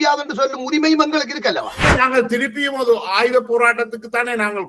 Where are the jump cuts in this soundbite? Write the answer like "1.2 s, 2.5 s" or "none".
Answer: 1.8 s